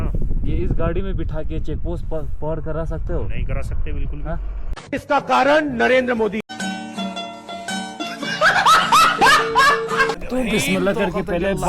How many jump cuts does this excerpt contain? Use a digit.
2